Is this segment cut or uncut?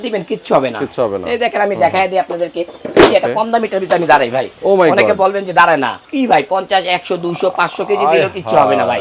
uncut